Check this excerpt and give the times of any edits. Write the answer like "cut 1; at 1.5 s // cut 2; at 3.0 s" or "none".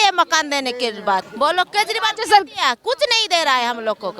cut 1; at 1.3 s